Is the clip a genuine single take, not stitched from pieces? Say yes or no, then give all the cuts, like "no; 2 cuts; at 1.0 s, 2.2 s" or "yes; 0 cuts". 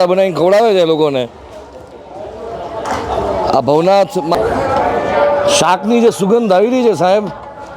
no; 1 cut; at 4.3 s